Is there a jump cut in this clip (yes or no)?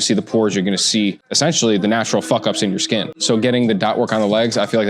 yes